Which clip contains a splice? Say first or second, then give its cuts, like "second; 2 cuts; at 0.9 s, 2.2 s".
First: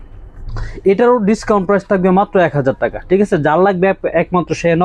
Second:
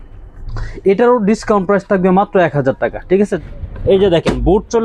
second; 1 cut; at 3.4 s